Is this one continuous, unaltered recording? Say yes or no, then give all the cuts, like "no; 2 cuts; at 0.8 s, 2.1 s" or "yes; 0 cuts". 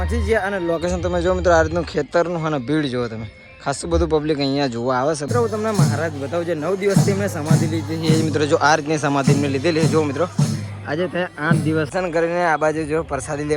no; 2 cuts; at 5.2 s, 11.9 s